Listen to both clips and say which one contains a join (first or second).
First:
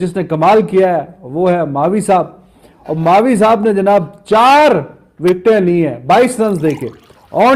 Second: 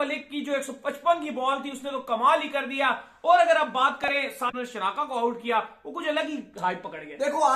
second